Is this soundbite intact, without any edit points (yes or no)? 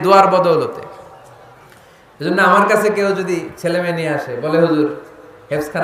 yes